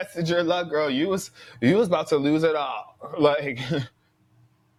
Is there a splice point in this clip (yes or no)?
no